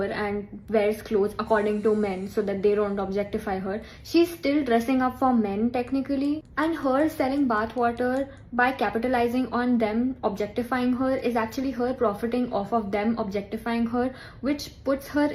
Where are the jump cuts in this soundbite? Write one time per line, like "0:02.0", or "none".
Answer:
none

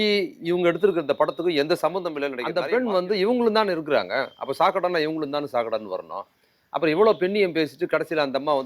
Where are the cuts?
0:02.4

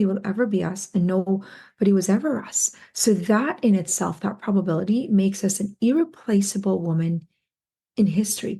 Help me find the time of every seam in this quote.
none

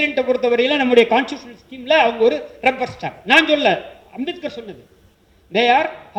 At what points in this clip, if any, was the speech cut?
none

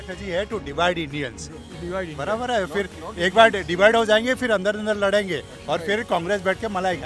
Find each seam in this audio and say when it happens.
none

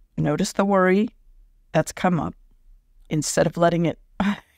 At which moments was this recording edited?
0:03.1

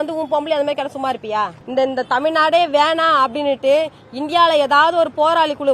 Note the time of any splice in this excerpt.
0:01.6

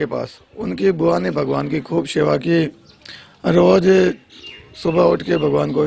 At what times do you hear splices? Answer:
none

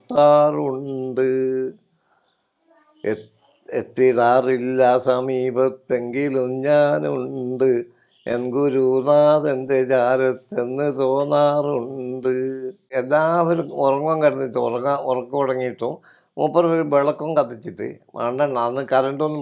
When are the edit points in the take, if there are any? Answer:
0:12.9

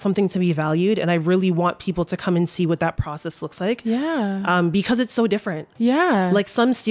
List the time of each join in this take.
none

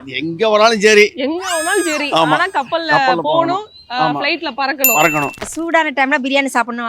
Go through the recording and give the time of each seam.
0:05.5

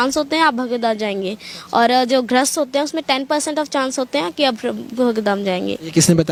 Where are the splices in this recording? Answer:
none

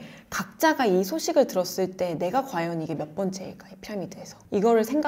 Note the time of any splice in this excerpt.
none

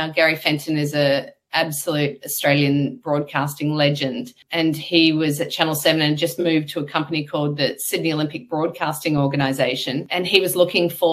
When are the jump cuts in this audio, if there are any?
0:04.4
0:10.1

